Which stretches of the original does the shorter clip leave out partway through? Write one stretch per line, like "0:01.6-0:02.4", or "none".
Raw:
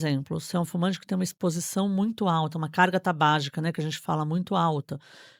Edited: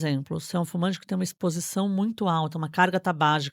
none